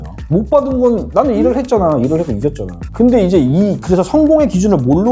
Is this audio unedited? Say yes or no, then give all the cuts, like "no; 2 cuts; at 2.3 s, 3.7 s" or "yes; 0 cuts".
yes; 0 cuts